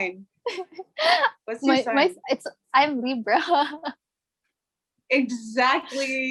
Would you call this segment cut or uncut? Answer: uncut